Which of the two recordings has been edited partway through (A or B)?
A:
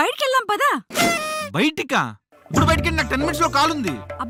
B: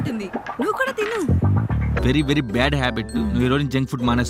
B